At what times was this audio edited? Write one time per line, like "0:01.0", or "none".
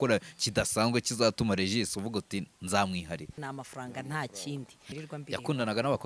0:03.4
0:04.9